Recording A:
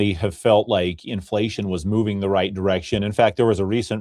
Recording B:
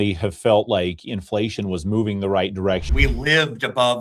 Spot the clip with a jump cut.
B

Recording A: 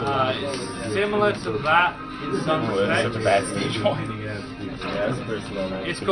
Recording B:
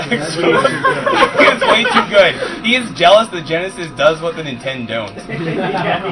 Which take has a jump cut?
A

